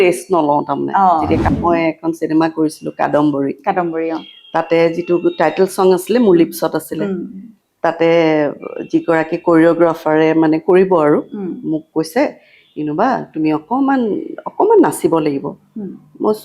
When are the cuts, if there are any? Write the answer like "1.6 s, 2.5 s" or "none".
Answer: 1.4 s